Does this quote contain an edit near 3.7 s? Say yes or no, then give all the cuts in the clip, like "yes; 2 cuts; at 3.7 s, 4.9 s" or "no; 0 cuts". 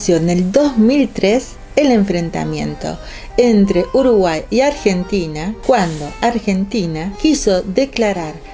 no; 2 cuts; at 5.5 s, 7.1 s